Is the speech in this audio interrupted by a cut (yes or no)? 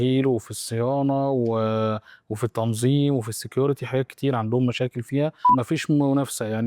yes